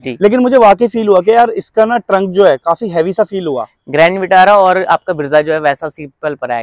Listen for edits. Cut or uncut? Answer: uncut